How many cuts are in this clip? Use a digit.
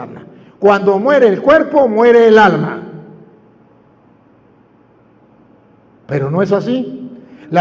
0